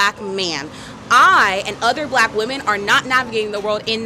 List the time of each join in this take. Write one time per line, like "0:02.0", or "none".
none